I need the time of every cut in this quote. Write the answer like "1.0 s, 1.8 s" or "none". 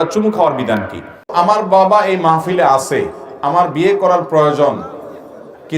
1.1 s